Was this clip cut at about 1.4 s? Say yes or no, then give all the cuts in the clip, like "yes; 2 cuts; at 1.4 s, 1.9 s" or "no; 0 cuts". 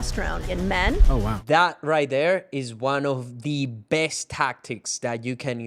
yes; 1 cut; at 1.4 s